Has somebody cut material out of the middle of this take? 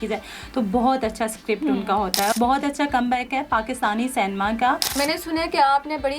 yes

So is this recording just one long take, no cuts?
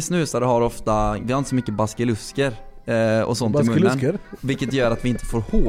no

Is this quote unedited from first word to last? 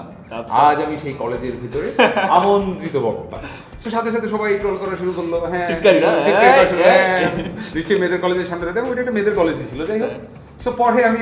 yes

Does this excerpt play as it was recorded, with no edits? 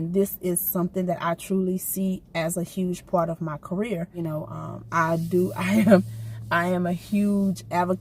no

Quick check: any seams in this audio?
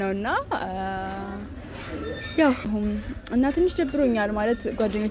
no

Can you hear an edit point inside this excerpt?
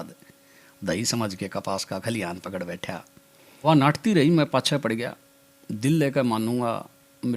yes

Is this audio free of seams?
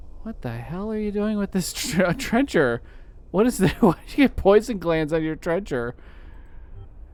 yes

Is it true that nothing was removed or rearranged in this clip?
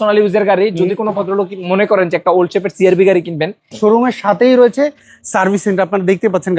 no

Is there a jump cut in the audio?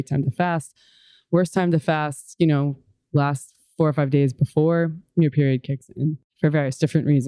yes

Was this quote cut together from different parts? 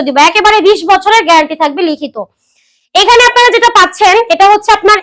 no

